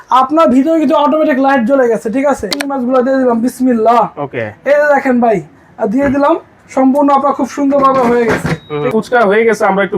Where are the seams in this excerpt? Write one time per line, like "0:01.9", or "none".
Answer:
0:02.6
0:08.9